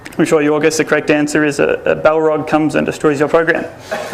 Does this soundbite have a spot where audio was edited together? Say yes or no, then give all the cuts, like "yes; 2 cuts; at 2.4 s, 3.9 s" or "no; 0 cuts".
yes; 1 cut; at 2.2 s